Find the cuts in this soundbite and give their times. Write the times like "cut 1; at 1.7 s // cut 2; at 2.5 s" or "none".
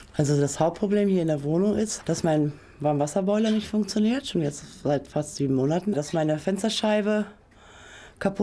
cut 1; at 1.9 s // cut 2; at 5.9 s